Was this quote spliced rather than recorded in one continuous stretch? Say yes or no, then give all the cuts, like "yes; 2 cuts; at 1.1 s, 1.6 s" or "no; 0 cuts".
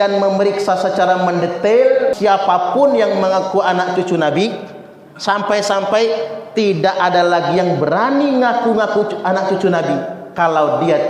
yes; 1 cut; at 2.2 s